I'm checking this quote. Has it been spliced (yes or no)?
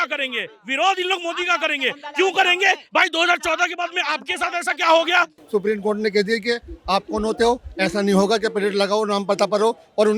yes